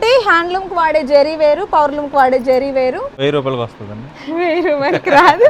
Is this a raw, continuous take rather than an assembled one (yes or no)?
no